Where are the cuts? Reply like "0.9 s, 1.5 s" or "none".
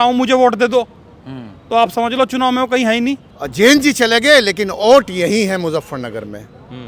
3.2 s